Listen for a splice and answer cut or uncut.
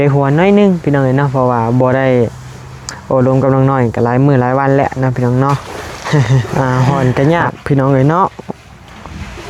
cut